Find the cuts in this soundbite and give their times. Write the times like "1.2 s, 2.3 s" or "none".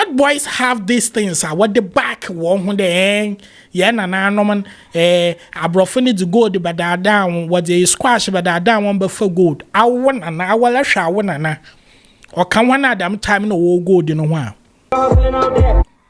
14.9 s